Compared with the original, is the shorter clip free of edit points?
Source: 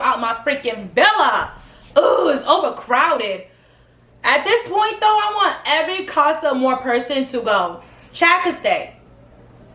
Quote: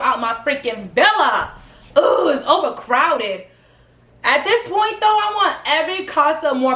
yes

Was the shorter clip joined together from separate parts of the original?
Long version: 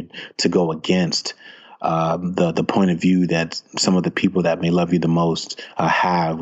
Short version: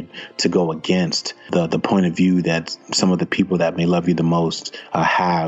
yes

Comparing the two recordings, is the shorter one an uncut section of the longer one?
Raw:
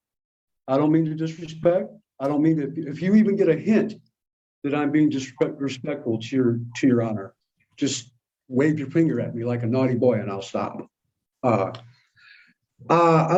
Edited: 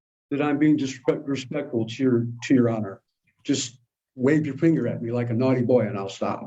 yes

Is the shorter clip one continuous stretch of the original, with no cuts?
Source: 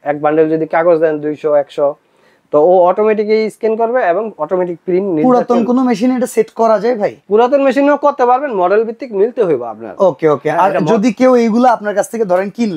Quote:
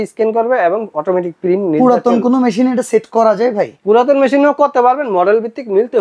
yes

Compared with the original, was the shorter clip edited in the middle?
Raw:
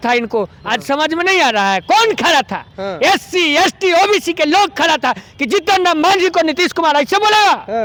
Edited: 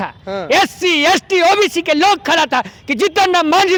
no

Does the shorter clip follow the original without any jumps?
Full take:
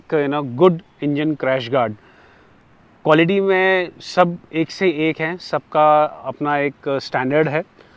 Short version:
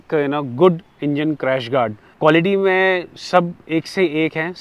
no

